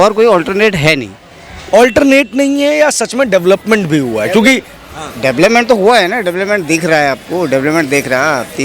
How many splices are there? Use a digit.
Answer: 0